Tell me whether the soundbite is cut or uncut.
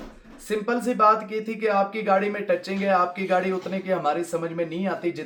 uncut